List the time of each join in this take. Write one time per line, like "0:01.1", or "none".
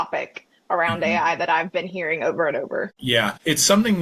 0:03.0